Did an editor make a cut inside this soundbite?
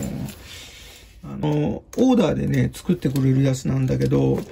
yes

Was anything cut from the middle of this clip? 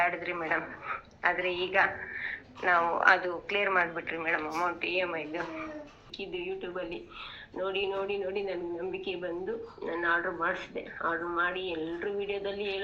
yes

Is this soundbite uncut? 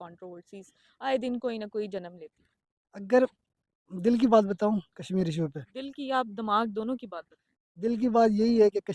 yes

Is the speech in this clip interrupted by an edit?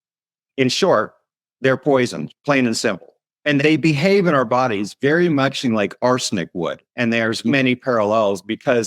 yes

